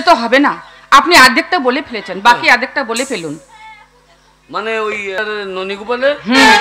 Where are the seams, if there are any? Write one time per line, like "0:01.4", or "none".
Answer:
0:05.2